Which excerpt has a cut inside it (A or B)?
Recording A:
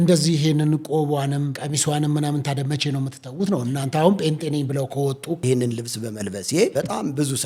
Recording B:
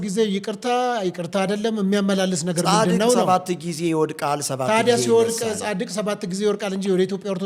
A